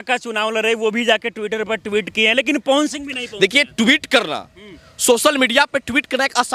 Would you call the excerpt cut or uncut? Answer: uncut